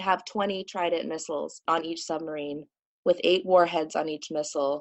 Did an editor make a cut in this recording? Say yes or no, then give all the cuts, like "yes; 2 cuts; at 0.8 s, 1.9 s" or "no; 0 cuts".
yes; 1 cut; at 1.6 s